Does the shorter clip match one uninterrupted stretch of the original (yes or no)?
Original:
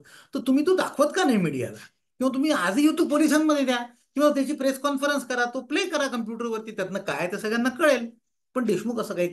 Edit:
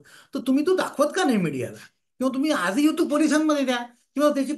yes